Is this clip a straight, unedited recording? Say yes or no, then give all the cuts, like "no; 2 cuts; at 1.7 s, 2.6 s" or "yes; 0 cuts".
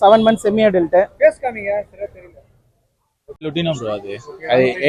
no; 1 cut; at 3.5 s